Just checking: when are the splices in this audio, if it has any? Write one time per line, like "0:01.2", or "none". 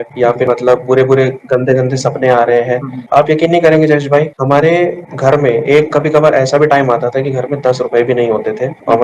0:03.0